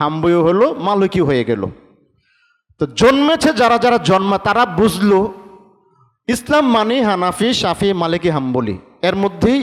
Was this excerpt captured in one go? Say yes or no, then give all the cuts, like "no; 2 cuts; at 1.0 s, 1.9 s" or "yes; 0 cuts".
yes; 0 cuts